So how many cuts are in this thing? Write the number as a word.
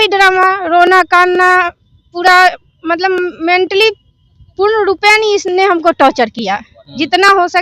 zero